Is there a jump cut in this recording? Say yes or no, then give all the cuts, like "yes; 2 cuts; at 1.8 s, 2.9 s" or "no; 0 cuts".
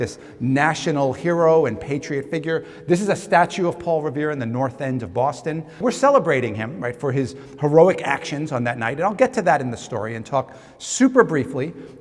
yes; 1 cut; at 5.8 s